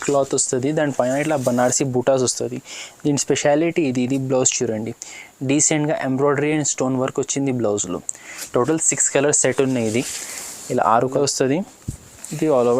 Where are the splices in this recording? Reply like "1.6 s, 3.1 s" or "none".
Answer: 11.2 s